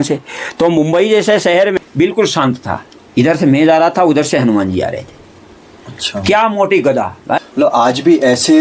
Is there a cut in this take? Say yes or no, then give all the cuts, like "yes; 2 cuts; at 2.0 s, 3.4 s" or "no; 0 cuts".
yes; 2 cuts; at 1.8 s, 7.2 s